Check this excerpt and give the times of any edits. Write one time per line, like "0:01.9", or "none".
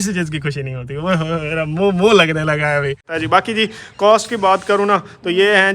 0:03.1